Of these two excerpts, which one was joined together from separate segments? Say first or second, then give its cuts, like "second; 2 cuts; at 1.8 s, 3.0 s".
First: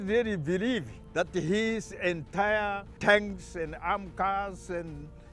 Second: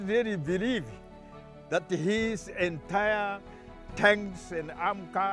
first; 2 cuts; at 1.0 s, 2.9 s